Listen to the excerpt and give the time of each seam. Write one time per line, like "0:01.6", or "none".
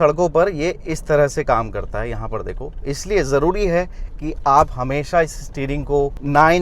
none